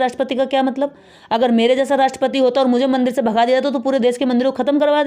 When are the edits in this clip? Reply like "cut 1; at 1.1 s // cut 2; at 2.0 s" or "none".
none